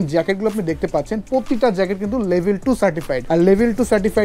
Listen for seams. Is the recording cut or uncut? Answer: cut